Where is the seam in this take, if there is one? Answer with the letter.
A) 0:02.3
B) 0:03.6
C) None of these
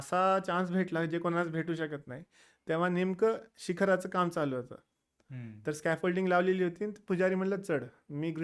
C